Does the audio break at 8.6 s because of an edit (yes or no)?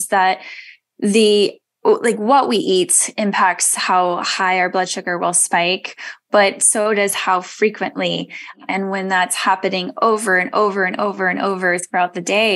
yes